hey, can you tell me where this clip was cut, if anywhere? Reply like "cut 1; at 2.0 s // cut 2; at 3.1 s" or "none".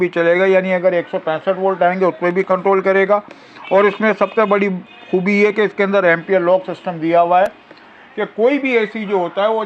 none